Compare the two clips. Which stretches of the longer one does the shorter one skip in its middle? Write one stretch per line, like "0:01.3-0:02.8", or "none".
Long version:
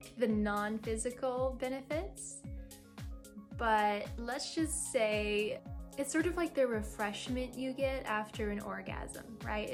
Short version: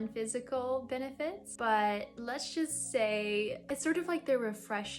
0:02.2-0:03.5
0:05.6-0:05.9